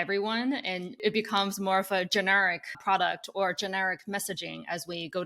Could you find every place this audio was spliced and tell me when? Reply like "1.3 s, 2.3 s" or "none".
1.0 s, 2.8 s